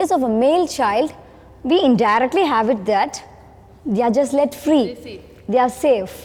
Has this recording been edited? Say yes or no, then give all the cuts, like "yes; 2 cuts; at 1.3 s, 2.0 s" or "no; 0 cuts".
no; 0 cuts